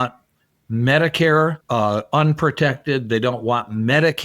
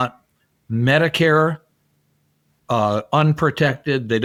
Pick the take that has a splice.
first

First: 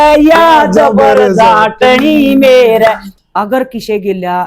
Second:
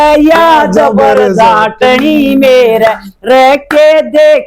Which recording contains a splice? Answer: first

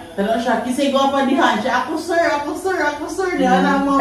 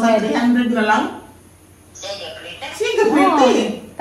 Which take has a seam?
first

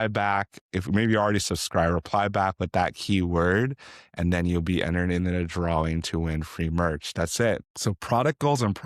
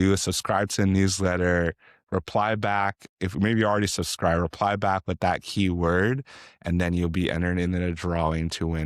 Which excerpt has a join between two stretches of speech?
first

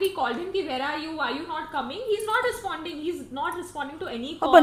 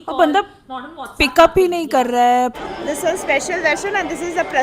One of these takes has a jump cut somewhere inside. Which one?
second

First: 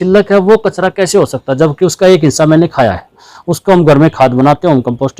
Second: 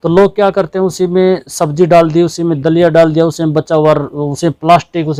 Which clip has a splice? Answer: first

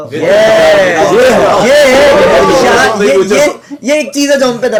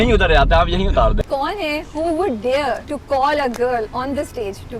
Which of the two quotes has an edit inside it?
second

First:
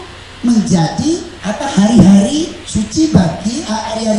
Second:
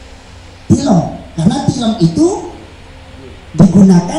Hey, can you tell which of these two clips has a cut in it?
first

